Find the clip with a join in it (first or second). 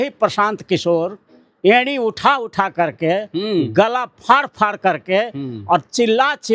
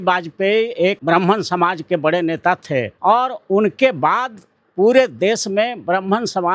second